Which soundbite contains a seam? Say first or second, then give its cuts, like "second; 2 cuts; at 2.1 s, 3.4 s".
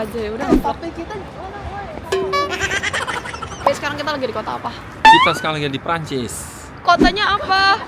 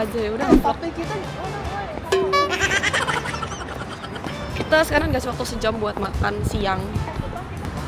first; 2 cuts; at 3.5 s, 4.8 s